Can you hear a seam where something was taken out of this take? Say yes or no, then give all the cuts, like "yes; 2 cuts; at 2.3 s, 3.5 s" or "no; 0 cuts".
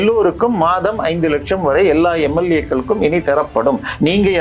no; 0 cuts